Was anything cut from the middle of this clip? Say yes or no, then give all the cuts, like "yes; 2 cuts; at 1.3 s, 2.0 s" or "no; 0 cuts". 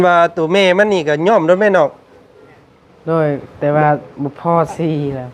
no; 0 cuts